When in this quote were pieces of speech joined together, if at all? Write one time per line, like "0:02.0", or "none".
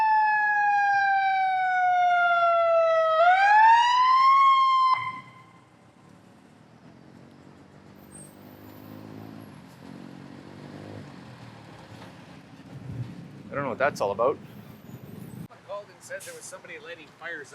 0:15.5